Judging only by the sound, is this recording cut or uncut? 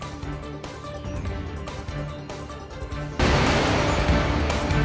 uncut